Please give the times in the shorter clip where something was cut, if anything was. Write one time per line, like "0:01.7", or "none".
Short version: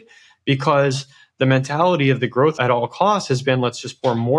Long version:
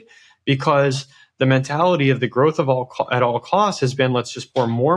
0:02.5